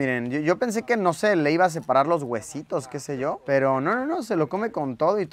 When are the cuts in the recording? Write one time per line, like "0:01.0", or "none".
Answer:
none